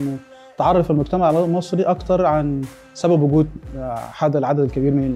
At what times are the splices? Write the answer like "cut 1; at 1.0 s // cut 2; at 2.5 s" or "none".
none